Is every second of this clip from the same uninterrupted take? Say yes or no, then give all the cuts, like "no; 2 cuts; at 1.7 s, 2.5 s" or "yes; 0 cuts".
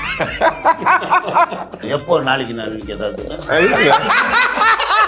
no; 1 cut; at 1.8 s